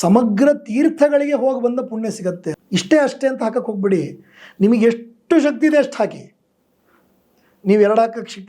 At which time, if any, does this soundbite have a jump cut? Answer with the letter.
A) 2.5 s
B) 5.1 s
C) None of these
A